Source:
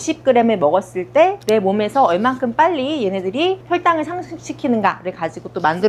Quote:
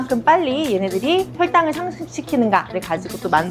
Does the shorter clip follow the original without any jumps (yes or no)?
yes